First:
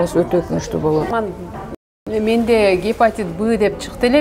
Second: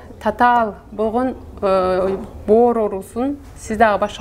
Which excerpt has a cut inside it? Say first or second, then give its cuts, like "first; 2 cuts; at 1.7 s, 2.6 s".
first; 1 cut; at 1.5 s